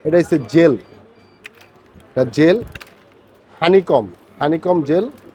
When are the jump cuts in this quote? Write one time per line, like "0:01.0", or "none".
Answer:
none